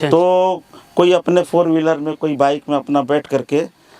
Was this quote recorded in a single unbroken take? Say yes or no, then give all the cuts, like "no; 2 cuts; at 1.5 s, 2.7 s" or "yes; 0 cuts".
yes; 0 cuts